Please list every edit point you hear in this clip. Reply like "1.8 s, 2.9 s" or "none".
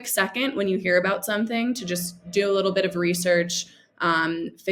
none

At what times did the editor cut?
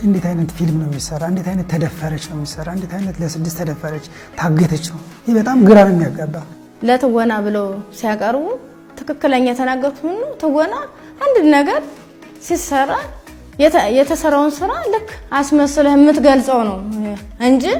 none

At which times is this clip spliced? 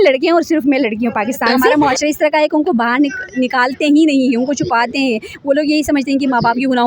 1.7 s

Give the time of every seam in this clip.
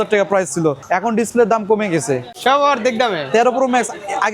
0.8 s, 2.3 s

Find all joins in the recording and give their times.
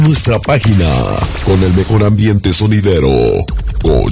none

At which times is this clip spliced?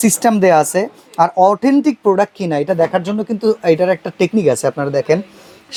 none

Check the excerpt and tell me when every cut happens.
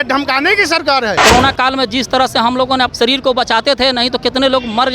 1.2 s, 2.9 s

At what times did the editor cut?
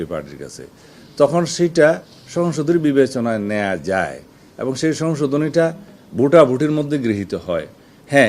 none

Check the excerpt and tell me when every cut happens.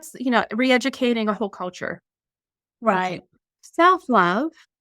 3.6 s

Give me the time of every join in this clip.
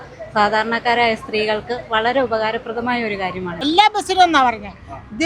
3.6 s

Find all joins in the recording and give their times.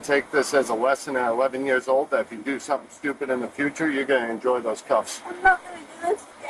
none

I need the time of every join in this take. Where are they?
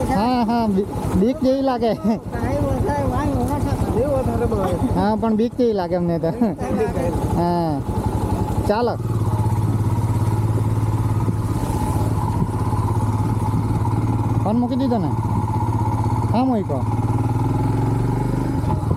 none

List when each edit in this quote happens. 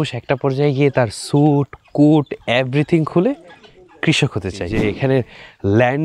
4.7 s

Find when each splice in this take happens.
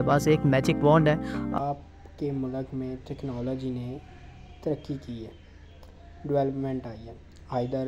1.6 s

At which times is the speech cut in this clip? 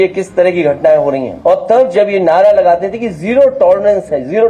1.3 s

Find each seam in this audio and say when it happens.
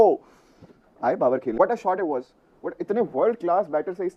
1.6 s

